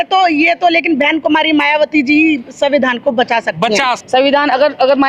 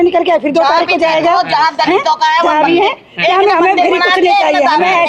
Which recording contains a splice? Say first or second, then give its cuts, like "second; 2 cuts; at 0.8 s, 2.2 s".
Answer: first; 1 cut; at 4.0 s